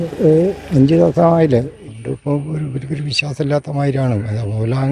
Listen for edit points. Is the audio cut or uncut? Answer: cut